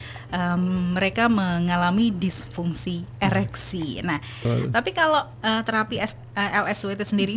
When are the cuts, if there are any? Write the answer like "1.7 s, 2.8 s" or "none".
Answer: 4.5 s